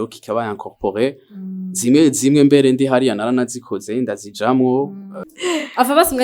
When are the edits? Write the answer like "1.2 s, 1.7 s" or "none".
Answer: 5.3 s